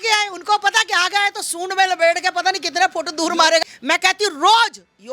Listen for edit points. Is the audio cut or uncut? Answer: cut